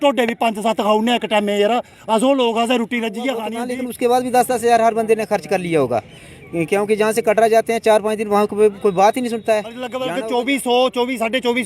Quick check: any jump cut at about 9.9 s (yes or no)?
yes